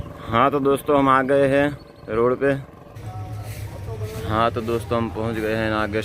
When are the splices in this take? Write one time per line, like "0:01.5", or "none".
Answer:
0:02.9